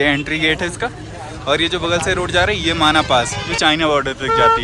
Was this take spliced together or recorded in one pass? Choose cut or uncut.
cut